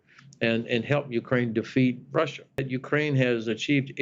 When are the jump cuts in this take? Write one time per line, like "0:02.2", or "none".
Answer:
0:02.7